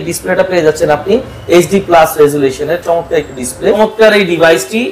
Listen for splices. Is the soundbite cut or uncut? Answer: cut